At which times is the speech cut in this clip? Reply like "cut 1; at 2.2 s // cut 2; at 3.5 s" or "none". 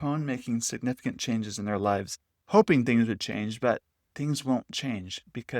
cut 1; at 2.3 s